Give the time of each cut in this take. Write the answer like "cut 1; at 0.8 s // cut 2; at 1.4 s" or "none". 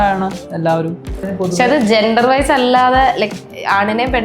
cut 1; at 1.2 s

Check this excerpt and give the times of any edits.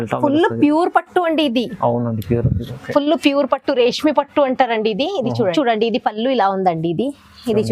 cut 1; at 5.5 s

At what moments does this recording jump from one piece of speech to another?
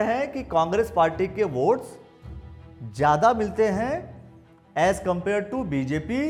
none

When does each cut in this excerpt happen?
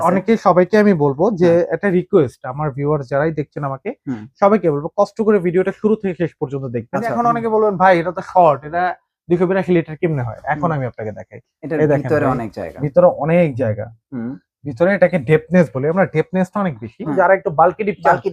cut 1; at 7.1 s // cut 2; at 17.1 s

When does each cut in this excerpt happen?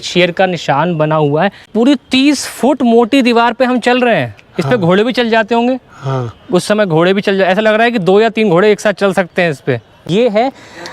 cut 1; at 1.7 s // cut 2; at 10.1 s

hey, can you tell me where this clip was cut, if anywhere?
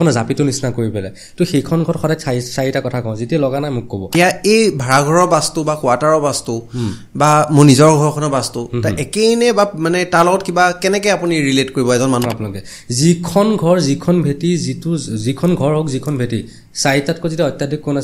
cut 1; at 4.1 s // cut 2; at 12.2 s

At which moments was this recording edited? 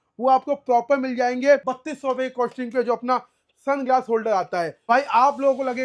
cut 1; at 1.7 s // cut 2; at 4.9 s

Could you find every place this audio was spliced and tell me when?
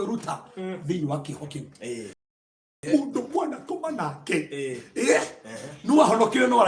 cut 1; at 2.2 s

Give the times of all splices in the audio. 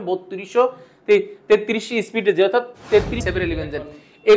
cut 1; at 3.3 s

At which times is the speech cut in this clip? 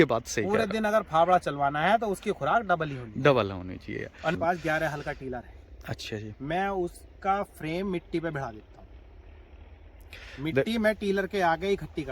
cut 1; at 4.3 s

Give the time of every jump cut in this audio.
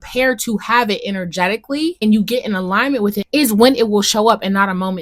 cut 1; at 2.0 s // cut 2; at 3.2 s

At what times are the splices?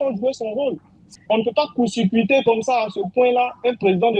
cut 1; at 1.1 s

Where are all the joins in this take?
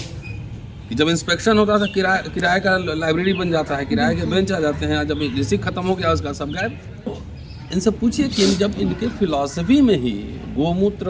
cut 1; at 7.1 s

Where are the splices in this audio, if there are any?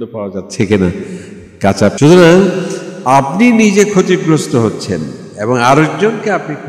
cut 1; at 1.9 s

